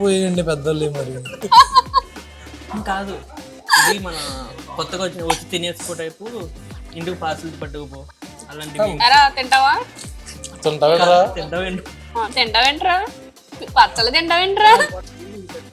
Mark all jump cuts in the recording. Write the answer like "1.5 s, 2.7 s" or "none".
1.4 s